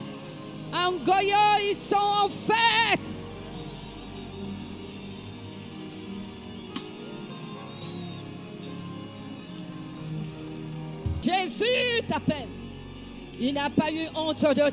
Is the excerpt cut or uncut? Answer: cut